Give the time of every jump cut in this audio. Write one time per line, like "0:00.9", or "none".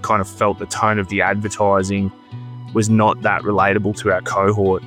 none